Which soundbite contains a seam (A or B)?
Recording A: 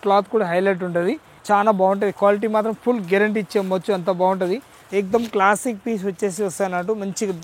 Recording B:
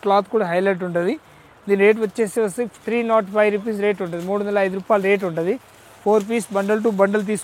A